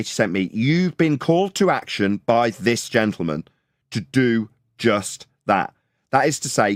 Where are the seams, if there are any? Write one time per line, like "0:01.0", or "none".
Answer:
none